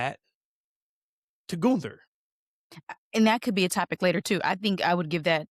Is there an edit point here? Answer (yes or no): no